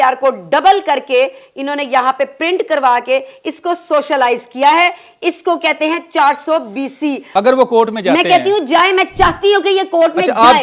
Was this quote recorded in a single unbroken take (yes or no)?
no